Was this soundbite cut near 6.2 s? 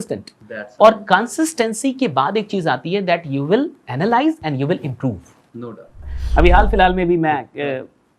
yes; 1 cut; at 6.2 s

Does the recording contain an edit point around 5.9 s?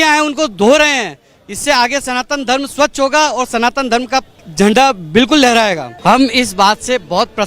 yes; 2 cuts; at 4.4 s, 5.9 s

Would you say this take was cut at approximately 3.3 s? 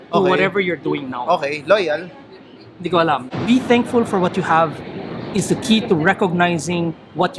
yes; 1 cut; at 3.3 s

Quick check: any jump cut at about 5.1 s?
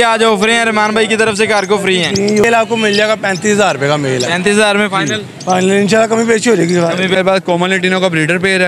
no; 2 cuts; at 2.4 s, 7.2 s

